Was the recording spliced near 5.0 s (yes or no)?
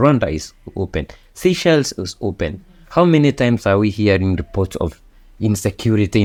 no